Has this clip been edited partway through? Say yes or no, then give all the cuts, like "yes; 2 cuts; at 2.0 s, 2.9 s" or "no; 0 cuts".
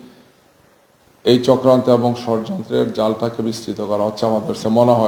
no; 0 cuts